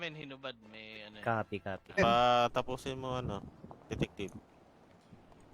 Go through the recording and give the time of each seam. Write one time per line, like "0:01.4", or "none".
0:02.0

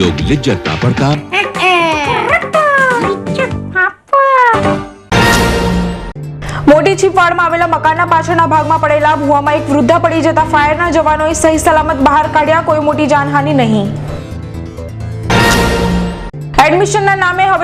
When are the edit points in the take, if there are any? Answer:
0:04.9

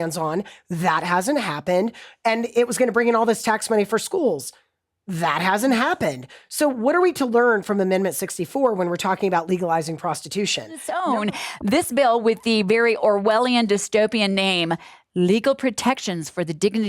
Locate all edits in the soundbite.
0:10.9

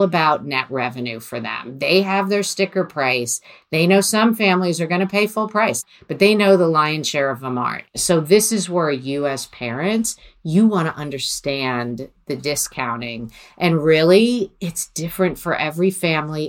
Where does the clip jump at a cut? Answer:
0:05.9
0:07.9

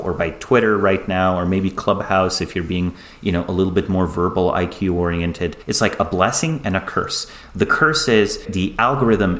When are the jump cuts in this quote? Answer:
0:05.6
0:08.5

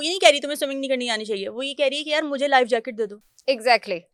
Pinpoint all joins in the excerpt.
none

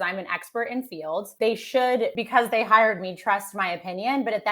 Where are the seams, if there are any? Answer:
0:01.3
0:02.2

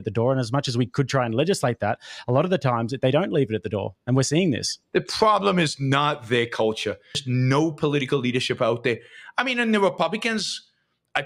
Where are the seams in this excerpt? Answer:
0:07.2

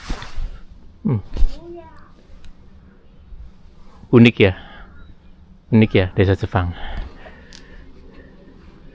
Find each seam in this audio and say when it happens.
none

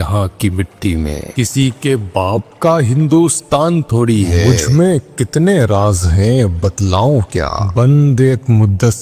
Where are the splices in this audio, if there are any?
0:01.3
0:04.4
0:07.6

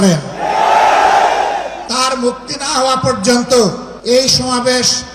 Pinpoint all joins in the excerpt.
0:01.8
0:03.9

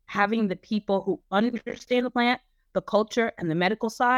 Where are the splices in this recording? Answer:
none

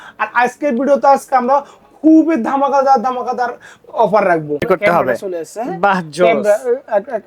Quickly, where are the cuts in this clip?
0:04.6

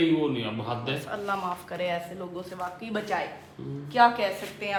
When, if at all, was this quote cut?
none

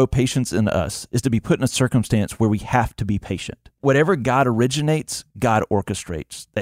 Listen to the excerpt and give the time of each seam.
0:03.8

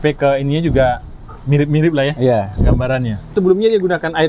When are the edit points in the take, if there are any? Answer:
0:03.3

